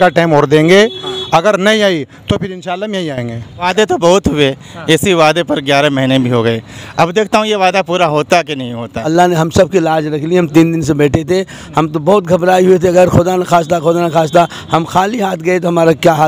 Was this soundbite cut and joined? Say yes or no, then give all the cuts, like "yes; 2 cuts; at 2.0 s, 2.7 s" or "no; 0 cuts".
yes; 2 cuts; at 3.7 s, 9.0 s